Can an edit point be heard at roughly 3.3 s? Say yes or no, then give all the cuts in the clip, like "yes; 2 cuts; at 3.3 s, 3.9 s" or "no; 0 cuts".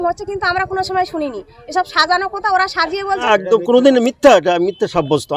yes; 1 cut; at 3.3 s